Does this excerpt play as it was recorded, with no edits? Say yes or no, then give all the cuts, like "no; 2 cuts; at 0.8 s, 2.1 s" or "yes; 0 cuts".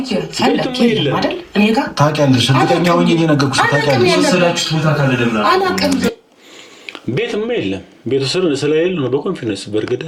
yes; 0 cuts